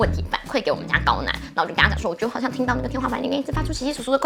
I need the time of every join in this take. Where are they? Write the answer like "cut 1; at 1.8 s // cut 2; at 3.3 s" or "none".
none